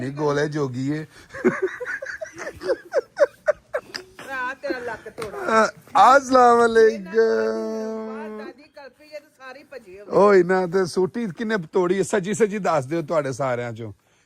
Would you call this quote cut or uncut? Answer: uncut